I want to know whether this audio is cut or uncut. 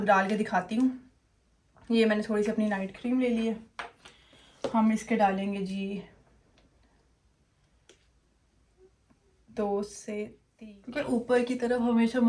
cut